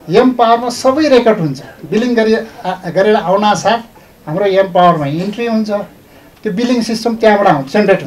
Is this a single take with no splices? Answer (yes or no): yes